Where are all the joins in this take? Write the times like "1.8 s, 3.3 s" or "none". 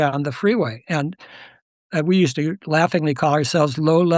1.8 s